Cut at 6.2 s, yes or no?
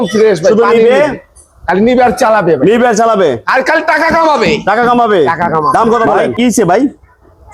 yes